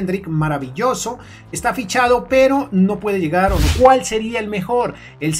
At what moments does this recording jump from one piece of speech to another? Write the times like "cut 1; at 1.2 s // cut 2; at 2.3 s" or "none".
cut 1; at 3.7 s